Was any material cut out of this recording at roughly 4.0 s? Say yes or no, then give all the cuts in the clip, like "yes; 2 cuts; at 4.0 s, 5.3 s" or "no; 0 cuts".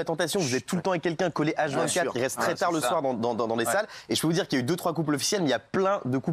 no; 0 cuts